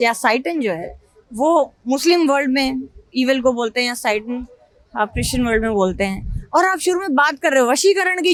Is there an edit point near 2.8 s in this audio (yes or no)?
no